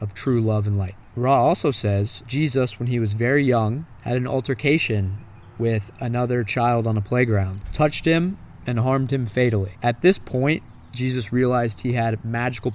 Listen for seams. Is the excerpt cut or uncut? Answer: cut